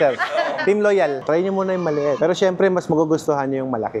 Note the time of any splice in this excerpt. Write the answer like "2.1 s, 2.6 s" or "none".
1.2 s